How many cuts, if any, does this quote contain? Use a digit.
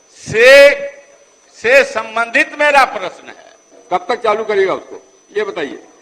1